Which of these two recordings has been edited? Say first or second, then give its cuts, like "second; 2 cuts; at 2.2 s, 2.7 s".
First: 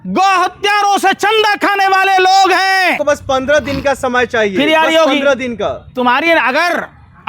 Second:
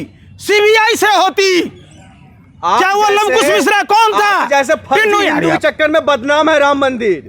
first; 1 cut; at 3.0 s